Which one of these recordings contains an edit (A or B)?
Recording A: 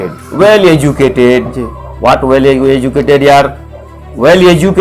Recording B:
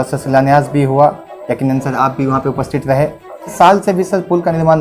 B